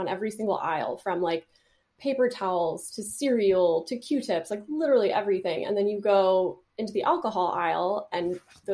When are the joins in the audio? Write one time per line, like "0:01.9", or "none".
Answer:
none